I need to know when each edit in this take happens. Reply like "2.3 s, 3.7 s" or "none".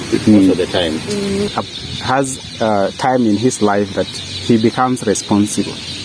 1.5 s